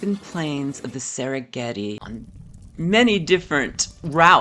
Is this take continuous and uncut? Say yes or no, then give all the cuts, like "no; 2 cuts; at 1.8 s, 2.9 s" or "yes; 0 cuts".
no; 1 cut; at 2.0 s